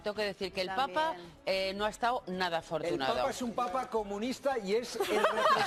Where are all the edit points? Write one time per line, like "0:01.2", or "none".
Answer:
none